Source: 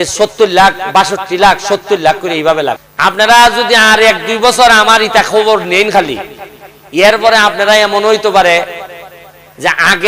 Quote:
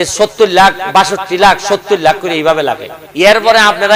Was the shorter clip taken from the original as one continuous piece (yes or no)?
no